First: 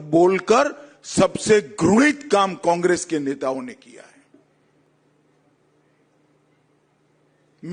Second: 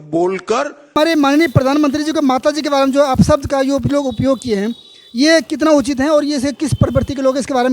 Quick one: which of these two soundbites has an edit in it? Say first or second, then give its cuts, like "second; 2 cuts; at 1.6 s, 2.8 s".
second; 1 cut; at 1.0 s